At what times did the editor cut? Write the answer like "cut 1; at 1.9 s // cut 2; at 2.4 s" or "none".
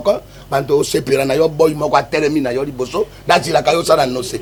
none